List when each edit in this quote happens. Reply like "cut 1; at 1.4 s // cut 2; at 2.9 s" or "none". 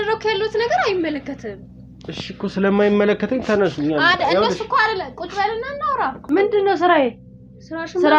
cut 1; at 6.2 s